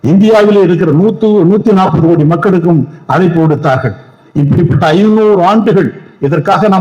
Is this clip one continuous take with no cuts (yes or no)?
yes